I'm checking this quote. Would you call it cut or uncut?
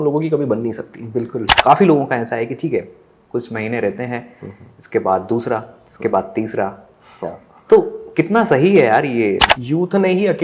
cut